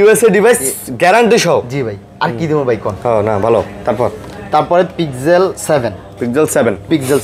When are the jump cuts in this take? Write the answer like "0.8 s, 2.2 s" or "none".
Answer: none